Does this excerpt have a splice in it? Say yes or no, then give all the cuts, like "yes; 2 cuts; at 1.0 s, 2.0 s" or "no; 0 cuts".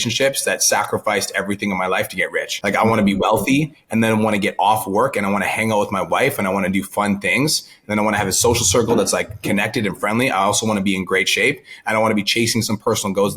yes; 1 cut; at 2.5 s